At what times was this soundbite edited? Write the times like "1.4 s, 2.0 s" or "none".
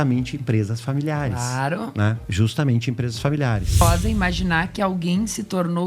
2.2 s, 3.8 s